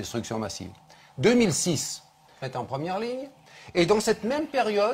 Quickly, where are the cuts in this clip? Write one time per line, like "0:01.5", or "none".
none